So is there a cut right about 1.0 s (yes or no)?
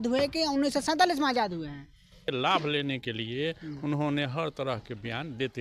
no